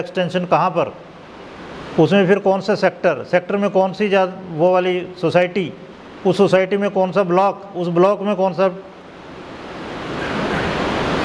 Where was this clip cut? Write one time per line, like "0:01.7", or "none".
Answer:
none